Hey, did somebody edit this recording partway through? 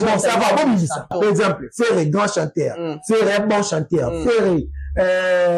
yes; 1 cut; at 1.1 s

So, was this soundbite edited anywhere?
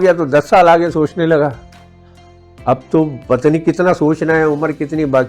no; 0 cuts

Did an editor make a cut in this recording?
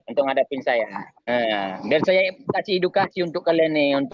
yes; 1 cut; at 1.1 s

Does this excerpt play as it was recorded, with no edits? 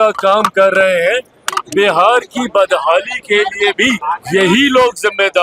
no; 1 cut; at 4.0 s

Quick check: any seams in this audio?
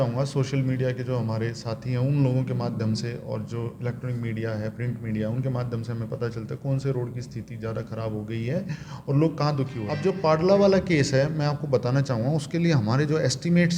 yes; 1 cut; at 9.9 s

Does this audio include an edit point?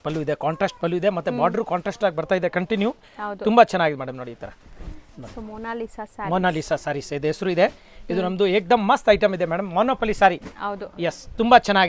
no; 0 cuts

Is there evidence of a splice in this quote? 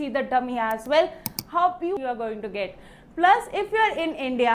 yes; 1 cut; at 1.9 s

